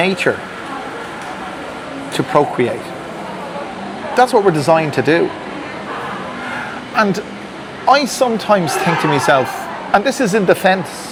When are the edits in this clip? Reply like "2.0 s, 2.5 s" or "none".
none